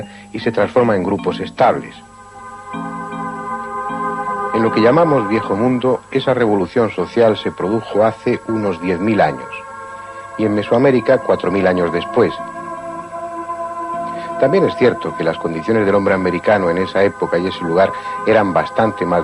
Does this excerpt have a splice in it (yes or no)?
no